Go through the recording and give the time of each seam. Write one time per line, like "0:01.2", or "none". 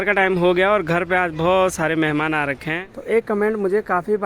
0:02.7